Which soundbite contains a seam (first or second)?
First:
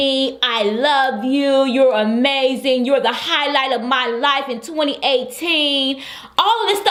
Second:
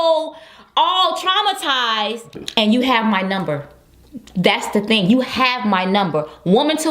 second